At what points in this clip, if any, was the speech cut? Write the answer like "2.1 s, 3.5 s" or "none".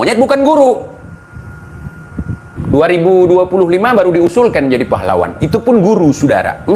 2.5 s